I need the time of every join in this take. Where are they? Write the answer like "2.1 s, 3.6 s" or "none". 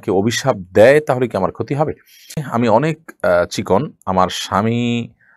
2.5 s